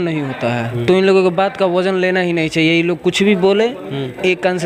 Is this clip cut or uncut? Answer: uncut